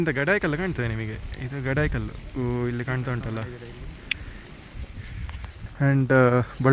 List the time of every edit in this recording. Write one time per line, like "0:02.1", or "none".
0:05.7